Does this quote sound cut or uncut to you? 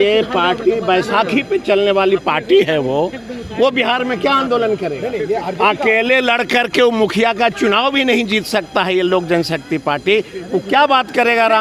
uncut